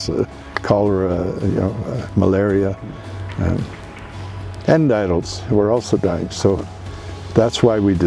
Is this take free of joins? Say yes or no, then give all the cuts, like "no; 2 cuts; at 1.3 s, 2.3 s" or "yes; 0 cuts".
yes; 0 cuts